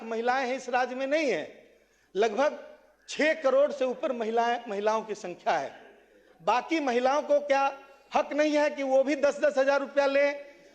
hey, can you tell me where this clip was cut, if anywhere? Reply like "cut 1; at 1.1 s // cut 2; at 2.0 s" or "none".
none